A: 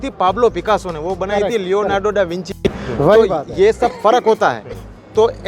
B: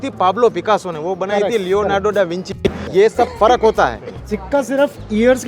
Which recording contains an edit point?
B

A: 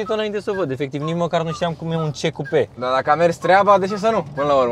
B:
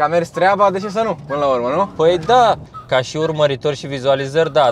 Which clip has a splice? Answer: B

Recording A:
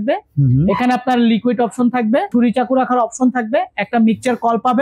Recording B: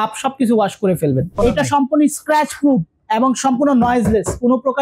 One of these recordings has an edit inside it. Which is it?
B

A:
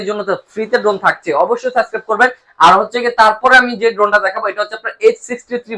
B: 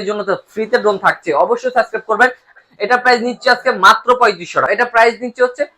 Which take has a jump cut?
B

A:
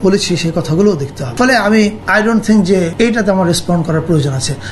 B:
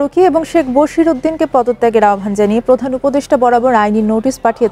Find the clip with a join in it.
A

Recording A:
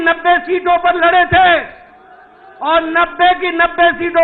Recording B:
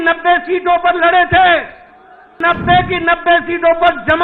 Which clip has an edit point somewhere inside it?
B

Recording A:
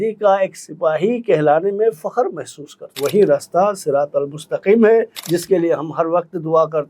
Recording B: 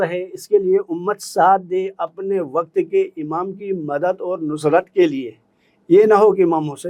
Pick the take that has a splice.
A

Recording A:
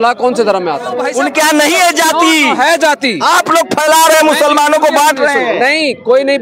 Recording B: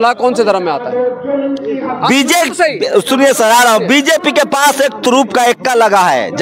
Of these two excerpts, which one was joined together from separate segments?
A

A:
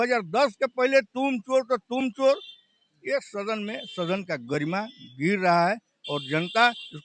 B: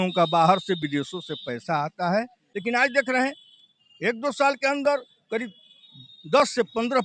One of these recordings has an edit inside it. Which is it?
B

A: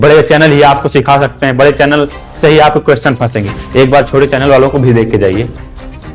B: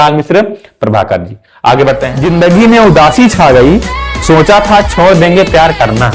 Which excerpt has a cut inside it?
B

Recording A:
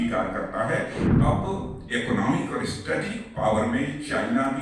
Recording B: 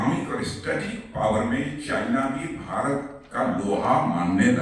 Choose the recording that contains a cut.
A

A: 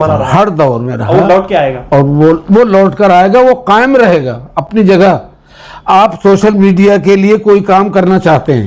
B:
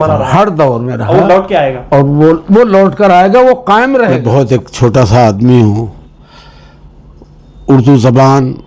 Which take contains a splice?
B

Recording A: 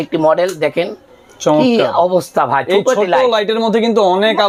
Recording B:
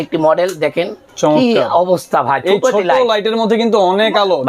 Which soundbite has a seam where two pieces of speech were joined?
B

